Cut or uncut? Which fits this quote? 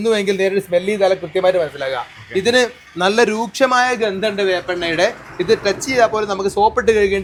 uncut